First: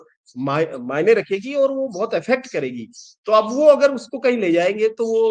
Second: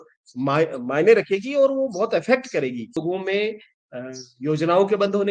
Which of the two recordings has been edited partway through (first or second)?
second